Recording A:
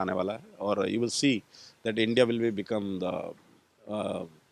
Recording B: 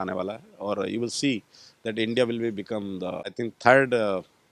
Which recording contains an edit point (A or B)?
B